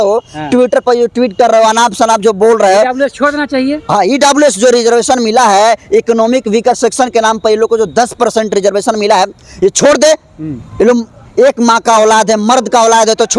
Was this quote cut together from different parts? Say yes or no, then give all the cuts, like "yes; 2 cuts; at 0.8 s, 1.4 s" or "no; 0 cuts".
no; 0 cuts